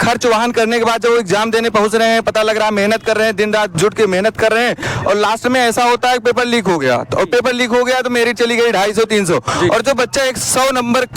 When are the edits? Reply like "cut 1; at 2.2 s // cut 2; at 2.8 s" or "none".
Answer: none